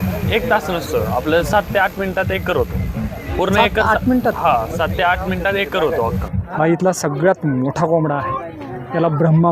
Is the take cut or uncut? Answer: cut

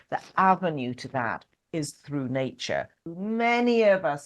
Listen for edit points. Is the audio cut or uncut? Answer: cut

